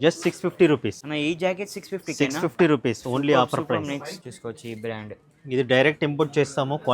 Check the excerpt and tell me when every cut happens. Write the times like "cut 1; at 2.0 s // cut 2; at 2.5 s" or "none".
cut 1; at 1.0 s // cut 2; at 4.2 s